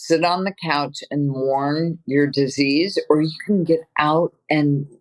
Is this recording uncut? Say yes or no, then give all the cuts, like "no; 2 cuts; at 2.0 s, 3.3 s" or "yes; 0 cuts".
yes; 0 cuts